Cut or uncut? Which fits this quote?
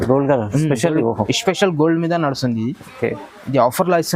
uncut